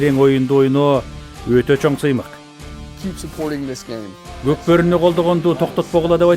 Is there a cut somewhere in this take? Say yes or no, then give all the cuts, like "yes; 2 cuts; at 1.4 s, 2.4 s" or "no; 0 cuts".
yes; 2 cuts; at 2.4 s, 4.2 s